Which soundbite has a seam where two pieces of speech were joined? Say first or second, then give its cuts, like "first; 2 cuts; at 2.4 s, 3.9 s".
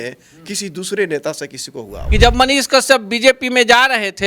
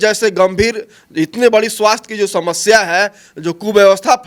first; 1 cut; at 2.0 s